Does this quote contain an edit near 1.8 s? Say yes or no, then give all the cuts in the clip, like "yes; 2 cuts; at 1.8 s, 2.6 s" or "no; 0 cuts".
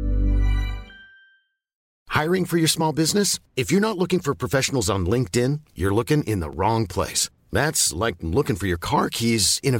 yes; 1 cut; at 1.8 s